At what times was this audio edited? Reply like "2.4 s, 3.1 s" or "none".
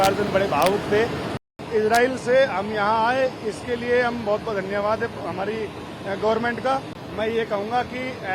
1.6 s, 7.0 s